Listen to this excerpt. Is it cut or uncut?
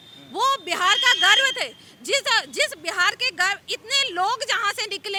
uncut